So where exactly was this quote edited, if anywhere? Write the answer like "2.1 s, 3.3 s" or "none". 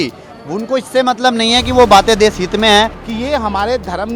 3.0 s